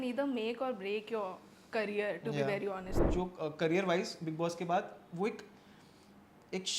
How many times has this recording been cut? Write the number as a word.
one